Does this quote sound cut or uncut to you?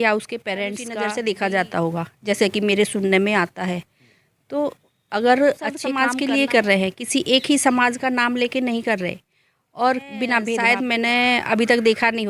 cut